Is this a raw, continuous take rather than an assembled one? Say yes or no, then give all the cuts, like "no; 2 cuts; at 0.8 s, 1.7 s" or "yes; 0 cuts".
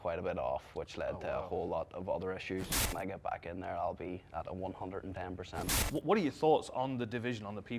no; 2 cuts; at 2.9 s, 5.7 s